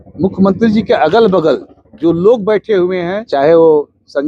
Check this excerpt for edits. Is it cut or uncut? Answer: cut